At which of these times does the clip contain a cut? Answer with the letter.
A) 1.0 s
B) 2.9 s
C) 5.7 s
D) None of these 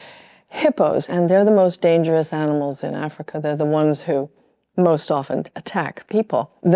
A